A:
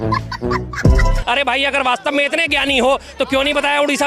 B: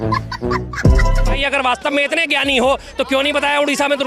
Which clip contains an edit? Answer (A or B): B